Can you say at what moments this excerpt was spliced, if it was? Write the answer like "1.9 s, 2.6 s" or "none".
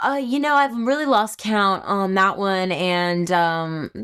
none